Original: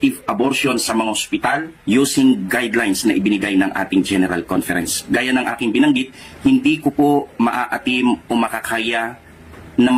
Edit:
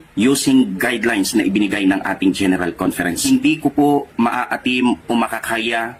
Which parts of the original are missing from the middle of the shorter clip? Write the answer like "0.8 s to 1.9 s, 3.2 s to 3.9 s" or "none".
4.9 s to 6.4 s